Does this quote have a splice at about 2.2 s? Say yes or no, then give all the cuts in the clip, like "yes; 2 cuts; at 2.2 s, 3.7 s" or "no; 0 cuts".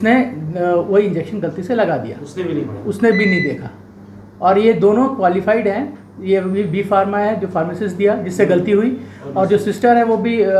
no; 0 cuts